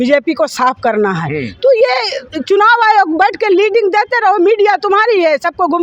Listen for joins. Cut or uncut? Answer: uncut